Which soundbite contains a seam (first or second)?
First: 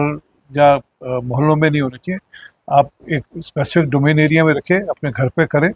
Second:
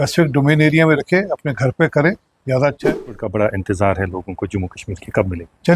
second